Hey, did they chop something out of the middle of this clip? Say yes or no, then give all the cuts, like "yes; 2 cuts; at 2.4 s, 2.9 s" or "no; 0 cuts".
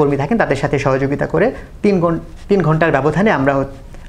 no; 0 cuts